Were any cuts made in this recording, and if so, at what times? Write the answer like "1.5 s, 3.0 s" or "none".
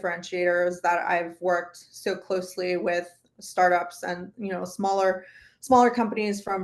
none